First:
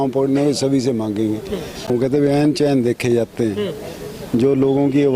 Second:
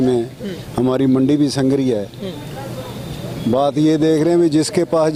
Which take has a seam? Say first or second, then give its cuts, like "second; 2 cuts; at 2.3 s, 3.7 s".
first; 1 cut; at 1.9 s